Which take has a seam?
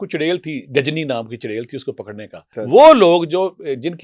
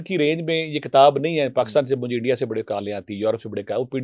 first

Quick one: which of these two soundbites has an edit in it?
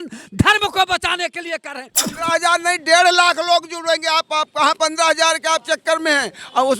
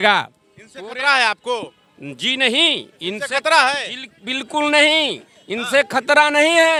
first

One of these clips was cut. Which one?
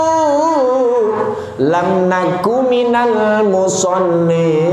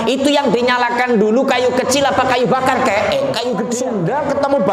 second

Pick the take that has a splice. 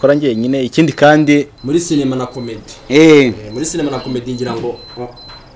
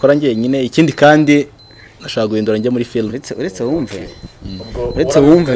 first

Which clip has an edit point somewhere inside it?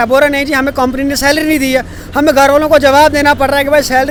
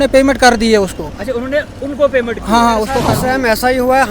second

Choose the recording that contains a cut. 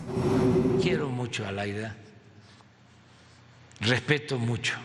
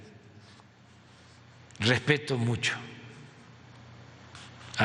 first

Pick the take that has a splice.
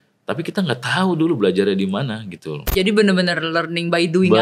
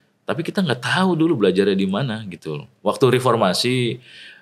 first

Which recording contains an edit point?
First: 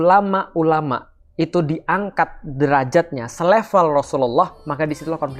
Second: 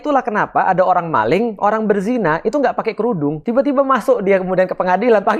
second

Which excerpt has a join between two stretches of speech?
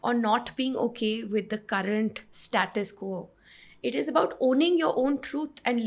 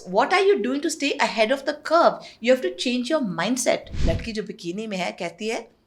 second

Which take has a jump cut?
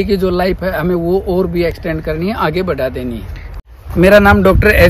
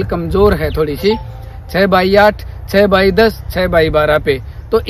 first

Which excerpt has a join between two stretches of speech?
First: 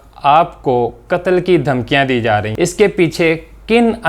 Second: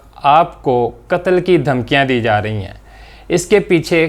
first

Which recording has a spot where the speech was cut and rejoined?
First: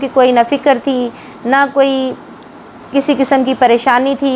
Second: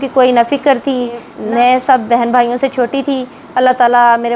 second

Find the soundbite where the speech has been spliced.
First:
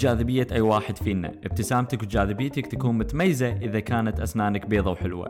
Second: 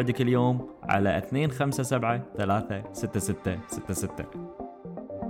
second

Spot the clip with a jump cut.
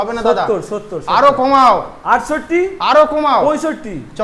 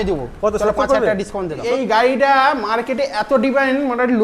second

